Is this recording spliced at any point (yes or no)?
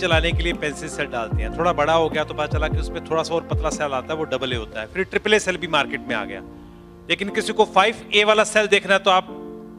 no